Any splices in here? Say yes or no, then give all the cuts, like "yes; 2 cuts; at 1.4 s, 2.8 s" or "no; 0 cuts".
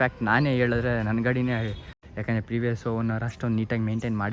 yes; 1 cut; at 1.9 s